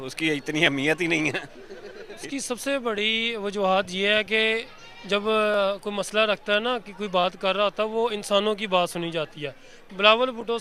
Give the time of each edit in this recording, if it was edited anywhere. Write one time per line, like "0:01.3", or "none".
none